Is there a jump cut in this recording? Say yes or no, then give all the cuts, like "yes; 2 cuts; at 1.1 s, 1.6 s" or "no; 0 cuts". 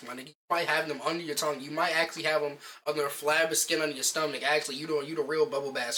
no; 0 cuts